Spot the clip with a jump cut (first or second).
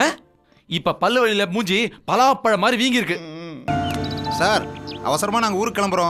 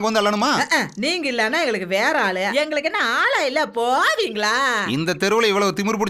first